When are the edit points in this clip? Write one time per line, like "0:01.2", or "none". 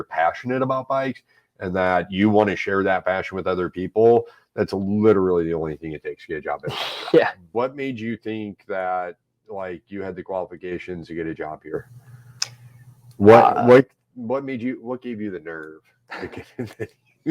0:07.4